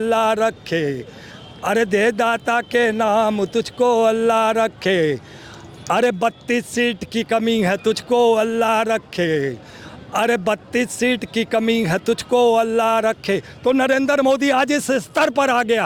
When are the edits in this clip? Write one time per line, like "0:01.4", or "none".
none